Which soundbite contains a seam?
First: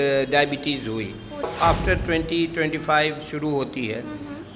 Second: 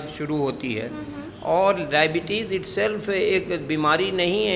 first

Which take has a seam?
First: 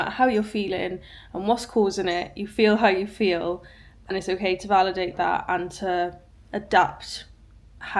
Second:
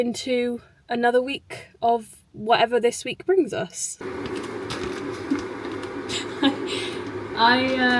second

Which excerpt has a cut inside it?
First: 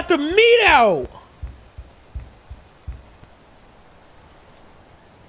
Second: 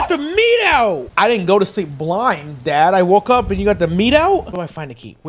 second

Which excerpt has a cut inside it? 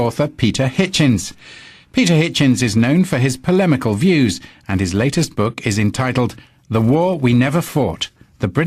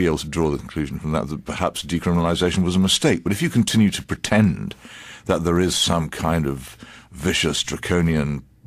second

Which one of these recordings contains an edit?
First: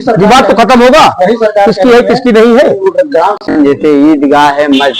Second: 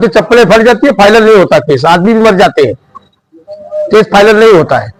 first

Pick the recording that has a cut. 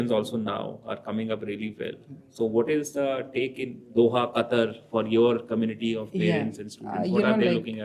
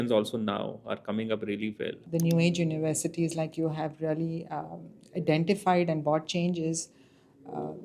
second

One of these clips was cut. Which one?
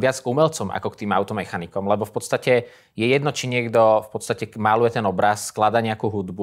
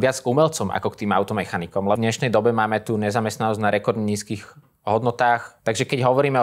second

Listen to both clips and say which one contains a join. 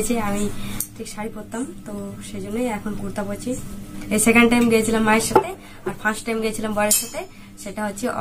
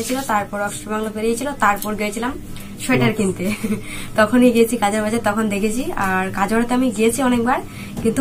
first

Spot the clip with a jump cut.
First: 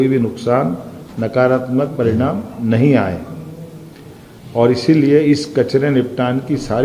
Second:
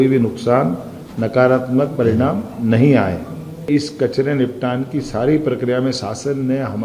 second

